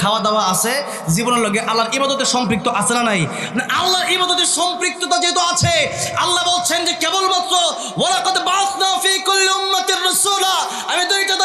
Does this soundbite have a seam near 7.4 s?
no; 0 cuts

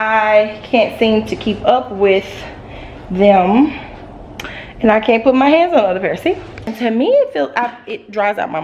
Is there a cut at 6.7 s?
yes; 1 cut; at 6.7 s

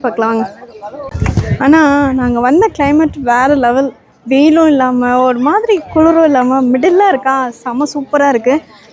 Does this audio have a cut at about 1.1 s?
yes; 1 cut; at 1.1 s

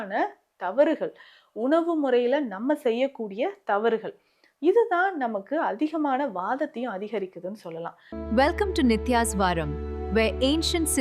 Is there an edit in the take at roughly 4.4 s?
no; 1 cut; at 8.0 s

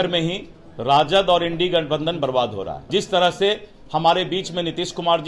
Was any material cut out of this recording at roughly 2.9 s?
yes; 1 cut; at 2.9 s

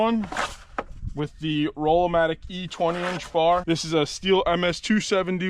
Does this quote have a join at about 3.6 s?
yes; 1 cut; at 3.6 s

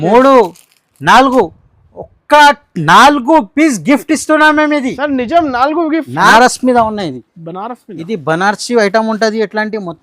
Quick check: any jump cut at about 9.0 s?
no; 1 cut; at 6.3 s

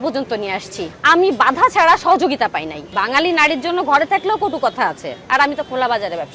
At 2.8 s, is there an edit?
yes; 1 cut; at 2.8 s

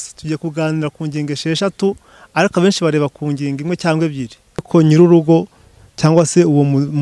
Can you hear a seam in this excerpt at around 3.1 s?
no; 1 cut; at 4.7 s

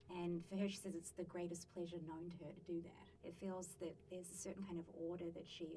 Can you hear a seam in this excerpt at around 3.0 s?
yes; 1 cut; at 3.0 s

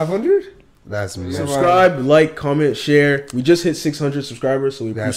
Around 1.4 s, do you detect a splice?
yes; 1 cut; at 1.4 s

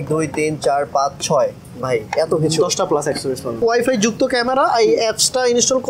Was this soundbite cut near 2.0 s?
no; 1 cut; at 3.6 s

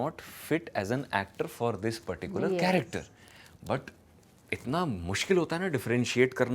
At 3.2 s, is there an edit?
no; 0 cuts

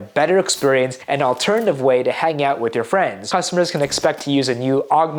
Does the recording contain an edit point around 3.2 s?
yes; 1 cut; at 3.2 s

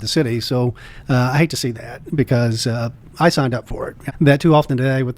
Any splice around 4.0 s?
yes; 2 cuts; at 0.9 s, 4.0 s

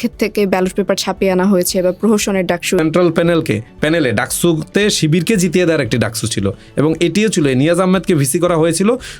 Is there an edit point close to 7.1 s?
no; 1 cut; at 2.8 s

